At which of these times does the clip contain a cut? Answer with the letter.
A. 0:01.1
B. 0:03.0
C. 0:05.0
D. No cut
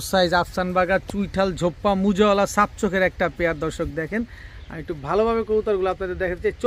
D